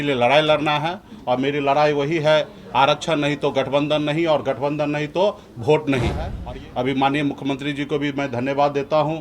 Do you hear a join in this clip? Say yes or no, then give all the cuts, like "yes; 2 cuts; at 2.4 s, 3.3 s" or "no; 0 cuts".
yes; 1 cut; at 6.3 s